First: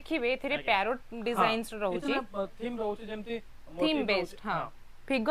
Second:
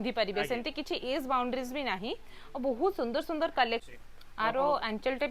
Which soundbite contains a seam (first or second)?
second